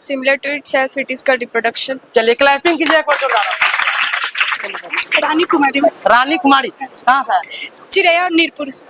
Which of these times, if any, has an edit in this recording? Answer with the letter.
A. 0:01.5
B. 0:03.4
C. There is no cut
C